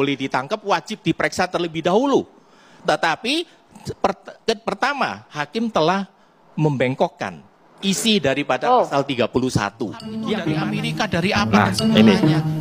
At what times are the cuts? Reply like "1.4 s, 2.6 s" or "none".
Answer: 10.1 s